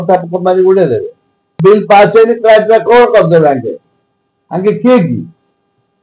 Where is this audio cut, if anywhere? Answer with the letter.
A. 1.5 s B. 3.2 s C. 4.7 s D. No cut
A